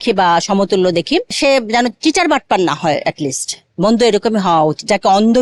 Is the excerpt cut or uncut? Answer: uncut